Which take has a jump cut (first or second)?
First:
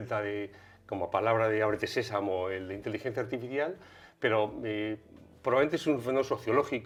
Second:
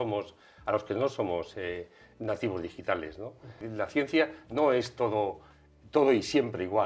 second